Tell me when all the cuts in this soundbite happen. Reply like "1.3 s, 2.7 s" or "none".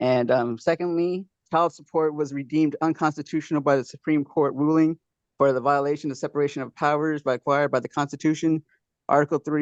1.4 s